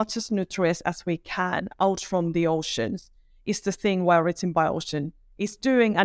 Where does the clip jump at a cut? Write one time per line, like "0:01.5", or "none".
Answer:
none